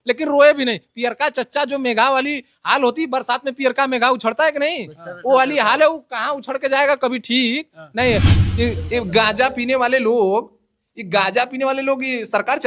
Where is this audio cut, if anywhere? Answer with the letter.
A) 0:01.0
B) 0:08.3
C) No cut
B